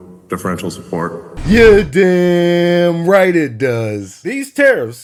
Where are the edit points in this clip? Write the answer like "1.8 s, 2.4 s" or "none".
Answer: none